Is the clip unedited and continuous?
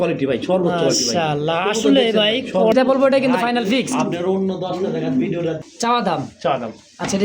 no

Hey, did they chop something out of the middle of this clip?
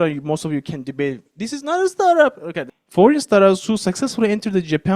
yes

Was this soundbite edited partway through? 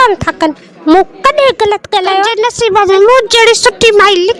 yes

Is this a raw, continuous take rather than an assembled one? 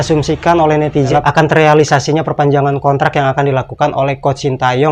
no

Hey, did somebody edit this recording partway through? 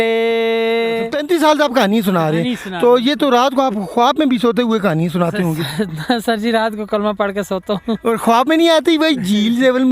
yes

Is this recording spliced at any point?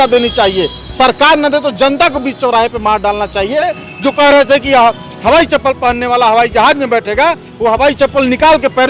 yes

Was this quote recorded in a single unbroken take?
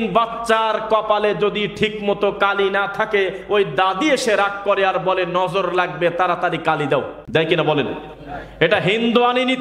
no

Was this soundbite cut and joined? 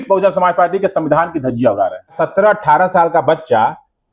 yes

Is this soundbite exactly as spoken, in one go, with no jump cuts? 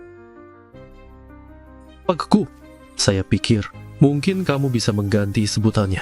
no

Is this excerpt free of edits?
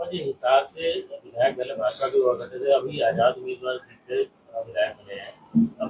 yes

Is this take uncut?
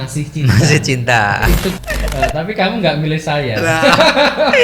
no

